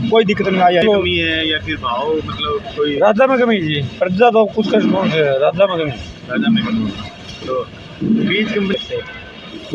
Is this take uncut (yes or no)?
no